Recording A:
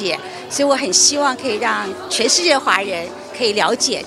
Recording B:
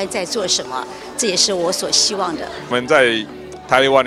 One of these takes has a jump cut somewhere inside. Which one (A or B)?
B